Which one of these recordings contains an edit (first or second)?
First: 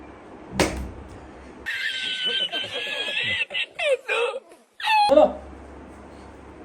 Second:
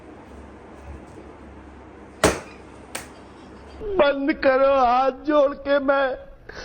first